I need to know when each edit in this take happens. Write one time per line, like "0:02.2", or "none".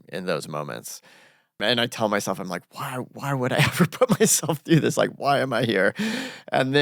0:01.6